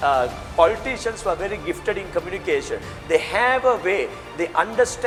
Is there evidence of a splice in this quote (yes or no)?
no